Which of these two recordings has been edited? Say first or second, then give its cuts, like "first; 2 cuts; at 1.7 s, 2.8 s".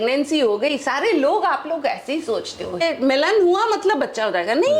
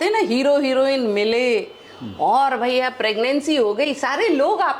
first; 1 cut; at 2.8 s